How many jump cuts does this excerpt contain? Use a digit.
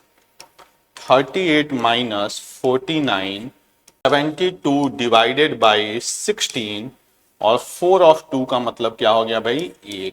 1